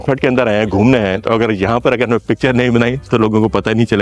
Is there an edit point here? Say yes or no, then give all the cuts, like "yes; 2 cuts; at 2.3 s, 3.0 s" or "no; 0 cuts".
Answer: no; 0 cuts